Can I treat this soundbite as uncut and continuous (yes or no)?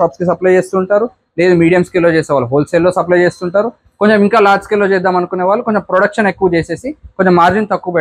yes